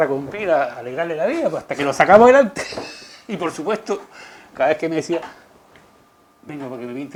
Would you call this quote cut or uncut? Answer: uncut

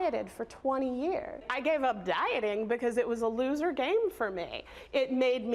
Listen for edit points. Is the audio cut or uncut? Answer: cut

